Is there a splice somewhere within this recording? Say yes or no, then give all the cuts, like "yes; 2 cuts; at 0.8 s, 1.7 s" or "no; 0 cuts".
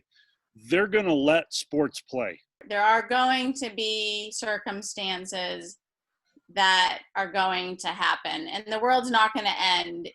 yes; 1 cut; at 2.6 s